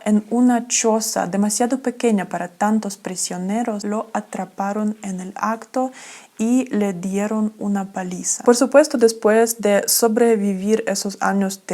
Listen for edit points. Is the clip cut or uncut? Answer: cut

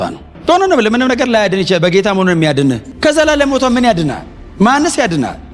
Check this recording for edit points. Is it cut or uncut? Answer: cut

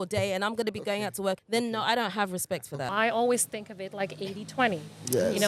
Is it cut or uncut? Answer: cut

